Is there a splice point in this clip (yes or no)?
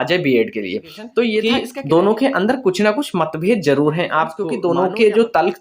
yes